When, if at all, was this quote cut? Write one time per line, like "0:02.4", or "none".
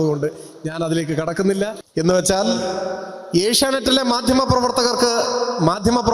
0:01.8

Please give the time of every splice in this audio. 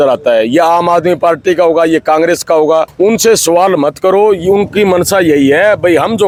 none

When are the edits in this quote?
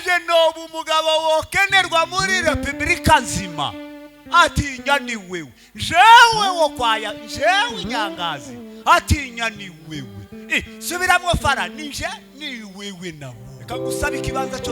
0:13.5

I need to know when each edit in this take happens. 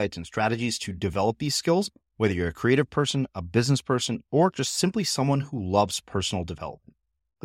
none

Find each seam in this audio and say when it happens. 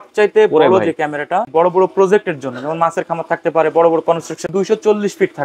0:01.5
0:04.4

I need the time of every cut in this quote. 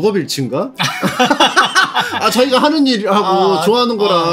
none

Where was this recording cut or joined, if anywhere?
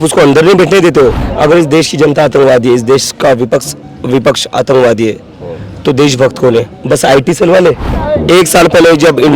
0:01.2
0:07.9

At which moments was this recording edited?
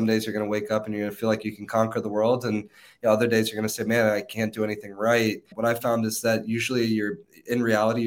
0:05.5

